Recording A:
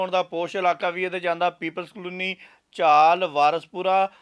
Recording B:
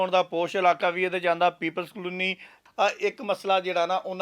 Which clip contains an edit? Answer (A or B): B